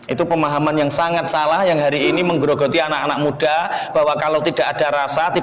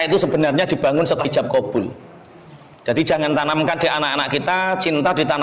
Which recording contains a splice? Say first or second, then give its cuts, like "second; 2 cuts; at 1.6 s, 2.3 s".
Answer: second; 1 cut; at 1.2 s